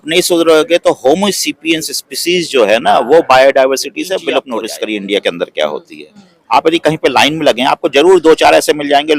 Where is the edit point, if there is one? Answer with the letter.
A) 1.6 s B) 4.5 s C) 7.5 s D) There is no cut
B